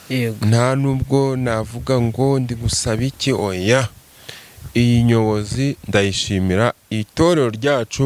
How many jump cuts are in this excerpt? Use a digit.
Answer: 0